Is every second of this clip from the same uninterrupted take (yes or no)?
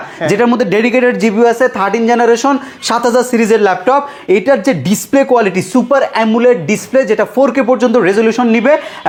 yes